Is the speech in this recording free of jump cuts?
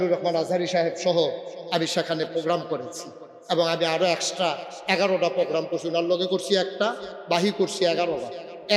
yes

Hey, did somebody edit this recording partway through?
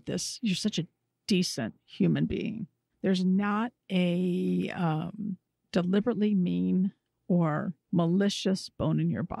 yes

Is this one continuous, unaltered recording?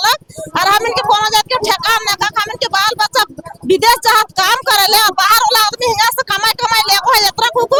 yes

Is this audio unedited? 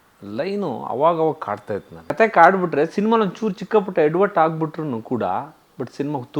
no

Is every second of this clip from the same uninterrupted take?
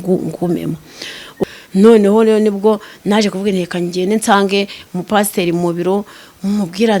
no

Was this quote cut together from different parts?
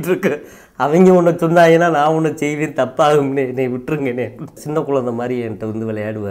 yes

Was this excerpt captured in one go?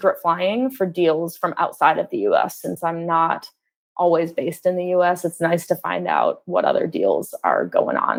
yes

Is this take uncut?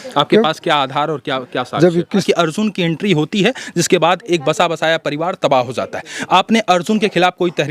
no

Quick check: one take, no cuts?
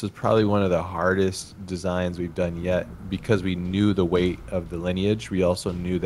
yes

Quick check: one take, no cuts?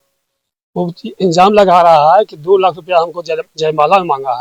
yes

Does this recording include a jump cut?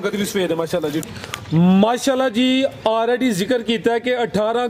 yes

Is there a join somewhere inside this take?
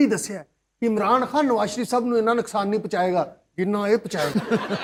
no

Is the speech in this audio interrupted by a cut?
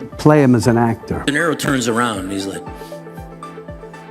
yes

